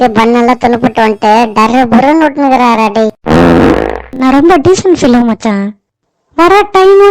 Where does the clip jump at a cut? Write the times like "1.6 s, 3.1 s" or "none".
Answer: 4.0 s